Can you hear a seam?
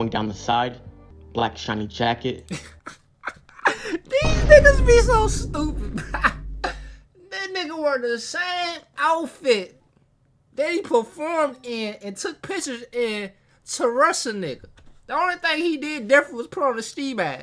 no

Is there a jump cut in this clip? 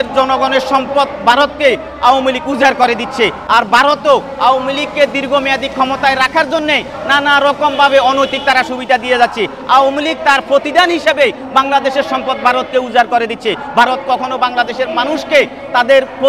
no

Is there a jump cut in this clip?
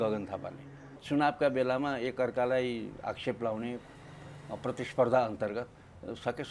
yes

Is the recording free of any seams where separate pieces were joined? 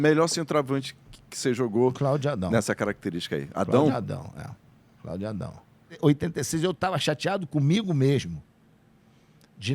no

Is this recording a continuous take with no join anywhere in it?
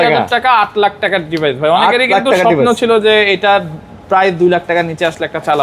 yes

